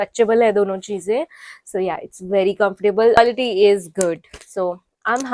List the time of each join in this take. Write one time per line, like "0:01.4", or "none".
0:03.2